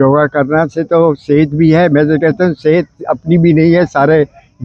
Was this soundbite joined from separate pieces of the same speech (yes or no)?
no